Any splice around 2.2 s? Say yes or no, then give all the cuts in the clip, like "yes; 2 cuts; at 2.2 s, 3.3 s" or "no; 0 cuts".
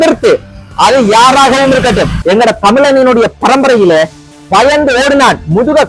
no; 0 cuts